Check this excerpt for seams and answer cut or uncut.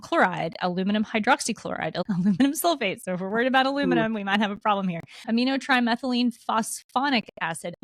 uncut